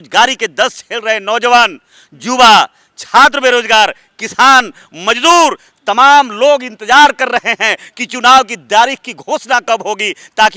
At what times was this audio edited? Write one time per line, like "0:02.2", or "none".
none